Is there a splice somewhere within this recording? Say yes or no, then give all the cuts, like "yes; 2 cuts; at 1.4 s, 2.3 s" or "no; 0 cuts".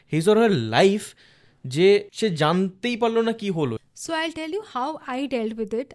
yes; 2 cuts; at 2.1 s, 3.9 s